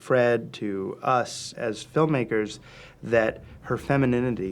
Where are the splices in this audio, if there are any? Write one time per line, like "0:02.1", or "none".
0:01.5